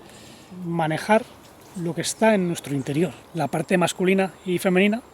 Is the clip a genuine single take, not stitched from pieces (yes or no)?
no